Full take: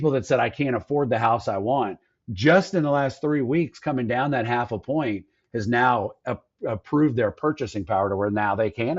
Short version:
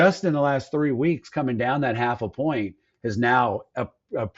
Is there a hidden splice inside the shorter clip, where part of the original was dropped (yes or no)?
no